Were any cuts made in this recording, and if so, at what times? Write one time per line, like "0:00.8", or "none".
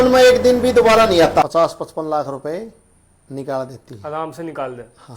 0:01.4